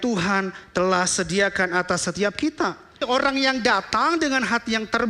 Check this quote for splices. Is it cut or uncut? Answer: cut